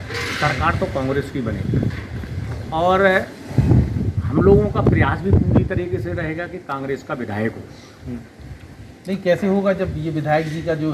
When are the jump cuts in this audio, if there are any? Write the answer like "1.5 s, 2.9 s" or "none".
none